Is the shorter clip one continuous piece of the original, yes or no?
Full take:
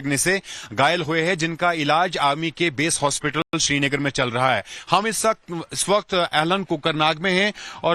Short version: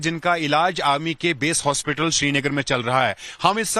no